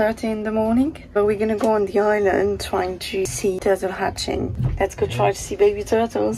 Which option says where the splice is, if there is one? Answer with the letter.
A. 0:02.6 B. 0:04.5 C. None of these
B